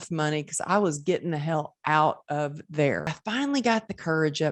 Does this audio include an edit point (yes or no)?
yes